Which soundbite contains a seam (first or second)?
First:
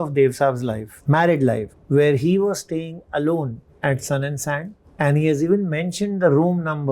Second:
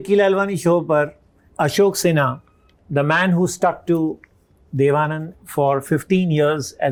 first